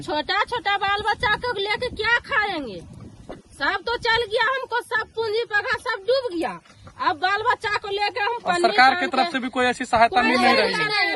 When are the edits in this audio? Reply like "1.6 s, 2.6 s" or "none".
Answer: none